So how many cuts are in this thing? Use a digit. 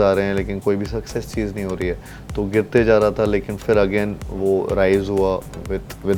0